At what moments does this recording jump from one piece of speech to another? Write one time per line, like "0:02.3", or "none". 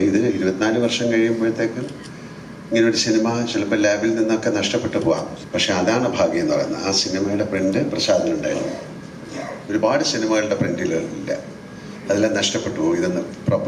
0:05.4